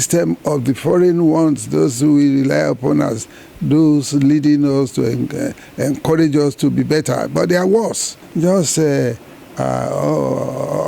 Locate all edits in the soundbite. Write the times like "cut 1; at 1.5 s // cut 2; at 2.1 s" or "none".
cut 1; at 8.2 s

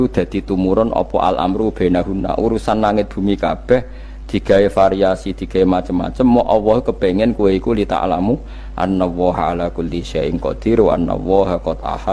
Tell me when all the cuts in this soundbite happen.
none

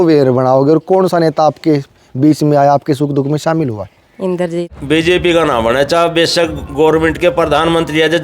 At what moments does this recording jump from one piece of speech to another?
cut 1; at 4.7 s

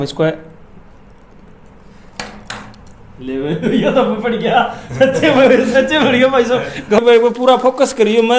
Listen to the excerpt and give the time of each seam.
cut 1; at 7.0 s

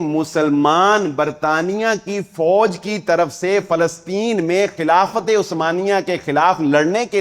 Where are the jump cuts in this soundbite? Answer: none

